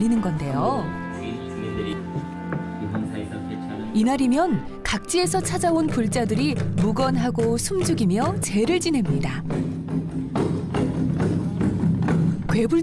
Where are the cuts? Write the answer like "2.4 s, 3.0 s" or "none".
none